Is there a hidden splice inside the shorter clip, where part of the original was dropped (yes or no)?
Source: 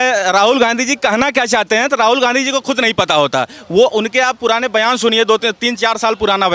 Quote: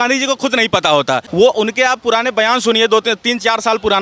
yes